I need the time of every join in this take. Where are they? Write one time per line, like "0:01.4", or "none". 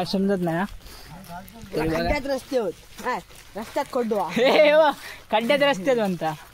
none